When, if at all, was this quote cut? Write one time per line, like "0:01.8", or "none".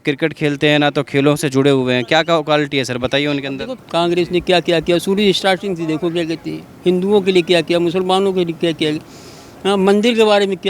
0:03.8